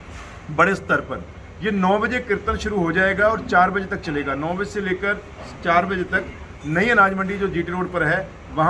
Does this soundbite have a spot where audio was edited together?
no; 0 cuts

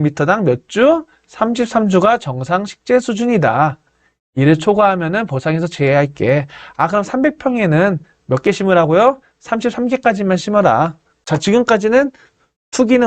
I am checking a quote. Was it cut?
yes; 1 cut; at 11.1 s

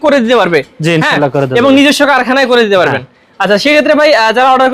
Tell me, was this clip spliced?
no; 0 cuts

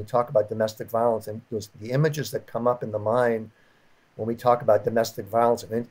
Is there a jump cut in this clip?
no; 0 cuts

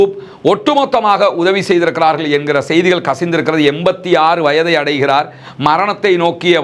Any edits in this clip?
no; 0 cuts

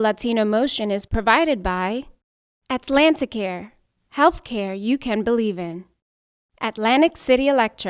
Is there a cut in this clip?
no; 0 cuts

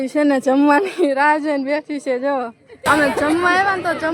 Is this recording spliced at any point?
yes; 1 cut; at 2.6 s

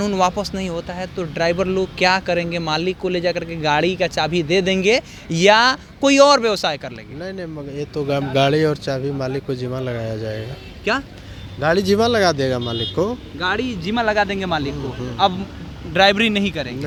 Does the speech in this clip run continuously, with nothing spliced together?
yes; 0 cuts

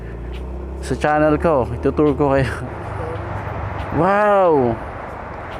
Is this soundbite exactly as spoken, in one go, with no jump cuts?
no; 1 cut; at 2.7 s

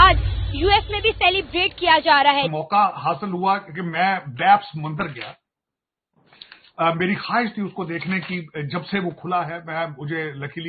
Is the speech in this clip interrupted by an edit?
yes; 1 cut; at 2.6 s

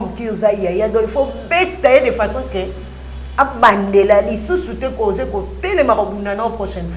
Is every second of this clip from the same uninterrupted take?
yes; 0 cuts

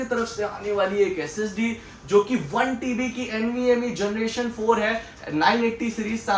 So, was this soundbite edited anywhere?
no; 0 cuts

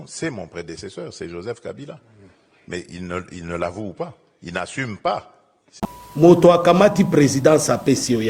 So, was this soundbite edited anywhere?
yes; 1 cut; at 5.7 s

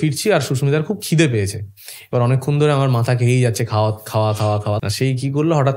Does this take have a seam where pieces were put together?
yes; 1 cut; at 4.8 s

